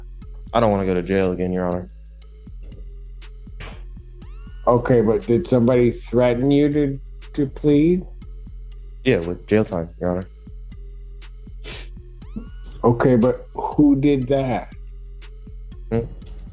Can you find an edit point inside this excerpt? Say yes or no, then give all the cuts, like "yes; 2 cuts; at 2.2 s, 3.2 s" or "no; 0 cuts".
no; 0 cuts